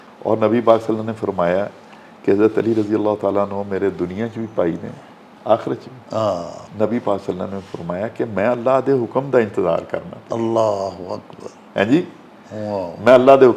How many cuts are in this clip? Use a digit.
1